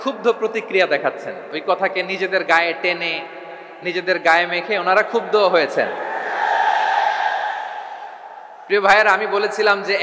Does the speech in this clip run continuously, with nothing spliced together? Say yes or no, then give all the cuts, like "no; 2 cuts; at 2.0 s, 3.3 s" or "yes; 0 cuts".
yes; 0 cuts